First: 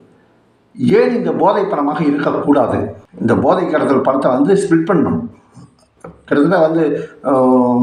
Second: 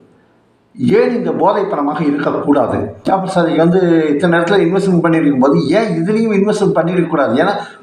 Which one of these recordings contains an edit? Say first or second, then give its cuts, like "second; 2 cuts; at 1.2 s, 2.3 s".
second; 1 cut; at 3.0 s